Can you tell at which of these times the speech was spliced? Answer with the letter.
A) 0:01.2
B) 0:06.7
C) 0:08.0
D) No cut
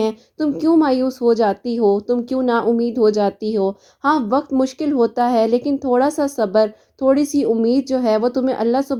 D